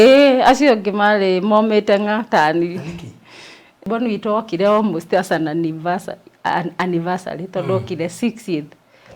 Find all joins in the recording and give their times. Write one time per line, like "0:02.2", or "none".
0:03.9